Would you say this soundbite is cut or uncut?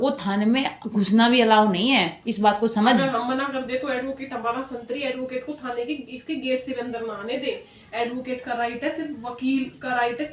uncut